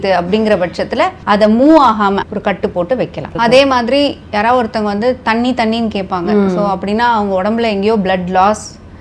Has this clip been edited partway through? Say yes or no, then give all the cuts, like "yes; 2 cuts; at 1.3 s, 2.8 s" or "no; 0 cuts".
yes; 3 cuts; at 1.2 s, 2.2 s, 3.3 s